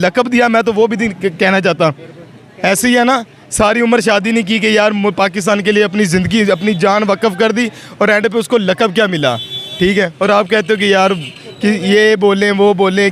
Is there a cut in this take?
no; 0 cuts

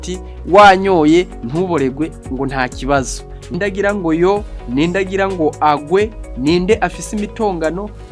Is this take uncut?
no; 1 cut; at 3.6 s

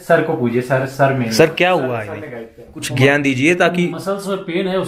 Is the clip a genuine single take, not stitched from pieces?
no; 1 cut; at 2.9 s

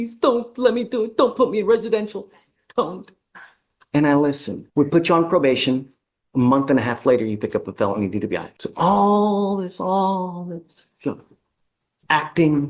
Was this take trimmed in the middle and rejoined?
yes; 2 cuts; at 4.5 s, 8.6 s

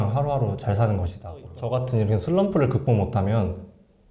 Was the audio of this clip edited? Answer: yes; 1 cut; at 1.5 s

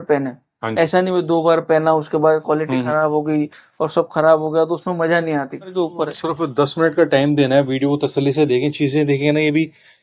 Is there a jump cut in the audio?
yes; 1 cut; at 5.7 s

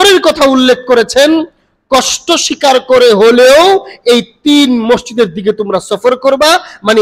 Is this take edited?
no; 0 cuts

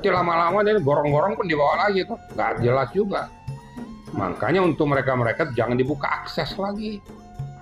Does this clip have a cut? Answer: no; 0 cuts

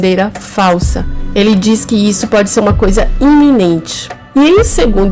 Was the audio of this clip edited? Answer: no; 0 cuts

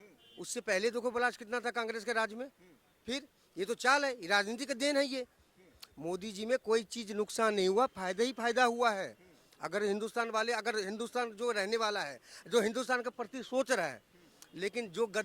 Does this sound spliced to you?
no; 0 cuts

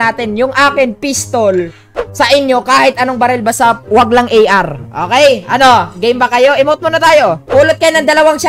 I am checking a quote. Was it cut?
yes; 1 cut; at 7.4 s

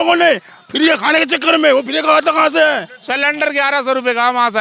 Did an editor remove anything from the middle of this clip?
yes; 1 cut; at 3.0 s

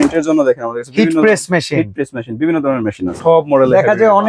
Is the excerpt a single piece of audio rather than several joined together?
no; 1 cut; at 3.1 s

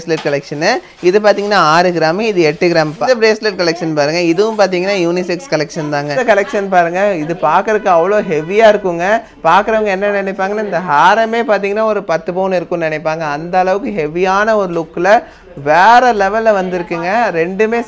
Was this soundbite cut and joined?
yes; 2 cuts; at 3.0 s, 6.1 s

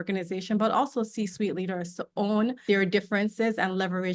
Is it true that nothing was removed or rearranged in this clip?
no; 1 cut; at 2.6 s

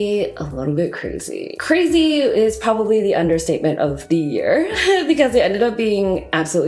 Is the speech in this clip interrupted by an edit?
no; 0 cuts

